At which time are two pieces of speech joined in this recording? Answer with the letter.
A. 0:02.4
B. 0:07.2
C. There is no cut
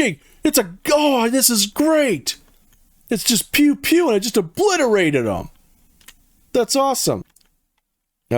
B